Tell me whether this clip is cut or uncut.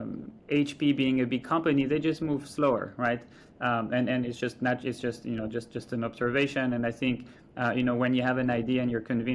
uncut